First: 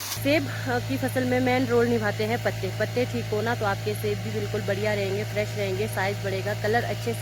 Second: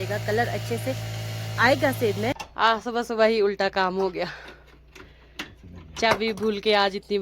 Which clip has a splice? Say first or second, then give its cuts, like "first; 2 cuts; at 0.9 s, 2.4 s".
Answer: second; 1 cut; at 2.5 s